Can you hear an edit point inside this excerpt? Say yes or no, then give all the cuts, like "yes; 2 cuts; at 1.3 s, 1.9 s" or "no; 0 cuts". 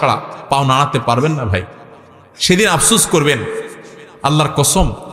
no; 0 cuts